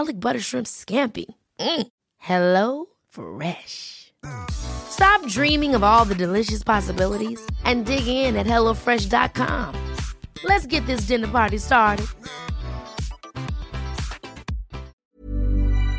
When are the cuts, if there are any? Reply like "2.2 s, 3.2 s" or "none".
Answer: 14.9 s